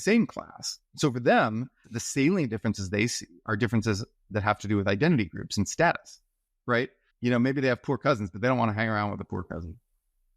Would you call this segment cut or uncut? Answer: cut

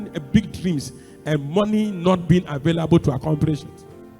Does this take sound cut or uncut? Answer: uncut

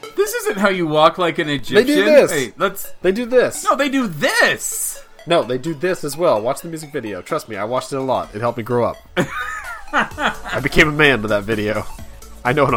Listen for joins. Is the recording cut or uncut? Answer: uncut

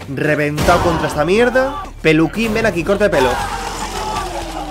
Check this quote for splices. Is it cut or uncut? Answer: cut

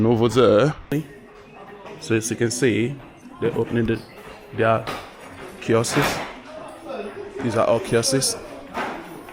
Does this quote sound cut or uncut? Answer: cut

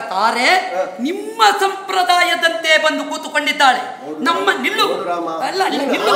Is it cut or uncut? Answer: uncut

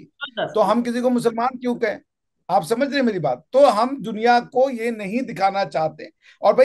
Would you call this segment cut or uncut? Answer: uncut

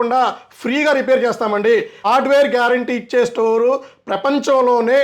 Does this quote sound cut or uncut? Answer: cut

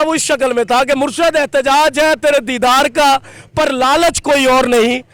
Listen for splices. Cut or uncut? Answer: uncut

